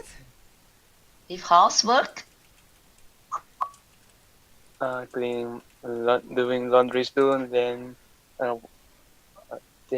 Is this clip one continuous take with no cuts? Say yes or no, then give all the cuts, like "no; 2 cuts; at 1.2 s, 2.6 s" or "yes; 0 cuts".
no; 1 cut; at 4.0 s